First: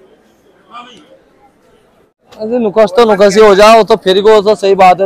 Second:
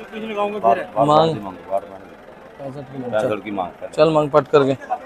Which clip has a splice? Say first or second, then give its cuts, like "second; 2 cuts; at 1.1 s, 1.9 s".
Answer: first; 1 cut; at 2.2 s